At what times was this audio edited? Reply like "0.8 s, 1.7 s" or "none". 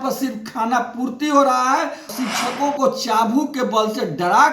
2.0 s